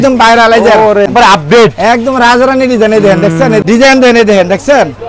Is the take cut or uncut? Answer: cut